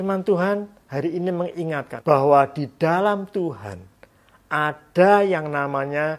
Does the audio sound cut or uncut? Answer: cut